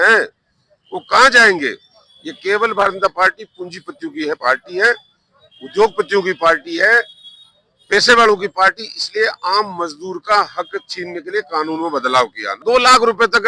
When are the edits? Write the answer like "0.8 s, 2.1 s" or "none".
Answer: 12.5 s